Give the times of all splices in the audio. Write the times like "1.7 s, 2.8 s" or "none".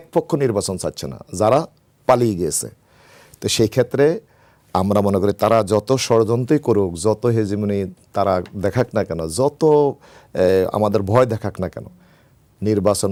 none